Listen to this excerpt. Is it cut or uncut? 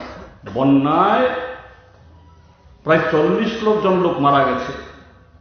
uncut